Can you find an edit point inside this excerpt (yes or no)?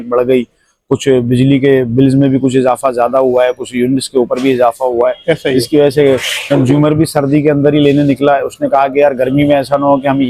no